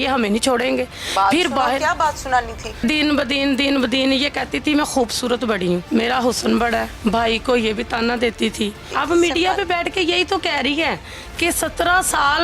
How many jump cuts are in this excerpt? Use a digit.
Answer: 4